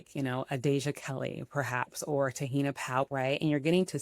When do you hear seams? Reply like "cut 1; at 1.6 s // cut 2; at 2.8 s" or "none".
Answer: cut 1; at 3.1 s